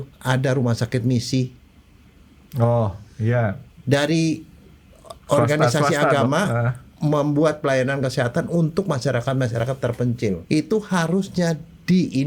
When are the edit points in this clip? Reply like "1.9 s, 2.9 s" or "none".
10.4 s